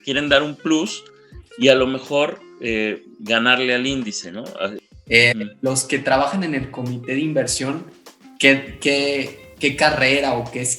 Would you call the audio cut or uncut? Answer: cut